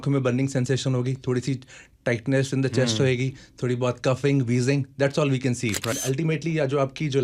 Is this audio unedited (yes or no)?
no